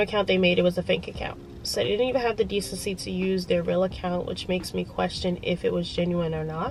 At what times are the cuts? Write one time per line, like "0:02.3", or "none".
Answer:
none